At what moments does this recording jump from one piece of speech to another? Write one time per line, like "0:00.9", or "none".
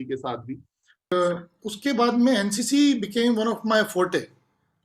0:01.1